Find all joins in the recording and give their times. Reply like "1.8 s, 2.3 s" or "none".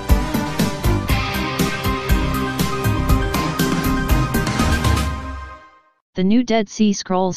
1.4 s